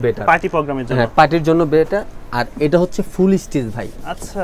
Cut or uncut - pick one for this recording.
uncut